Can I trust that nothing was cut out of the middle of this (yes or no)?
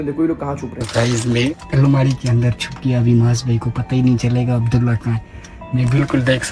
yes